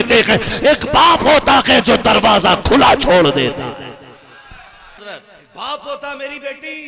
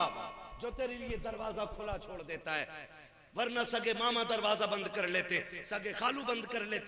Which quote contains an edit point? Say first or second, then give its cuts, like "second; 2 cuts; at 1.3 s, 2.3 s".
first; 1 cut; at 5.0 s